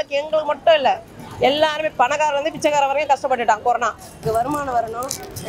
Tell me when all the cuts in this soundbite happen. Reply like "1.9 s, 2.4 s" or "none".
4.2 s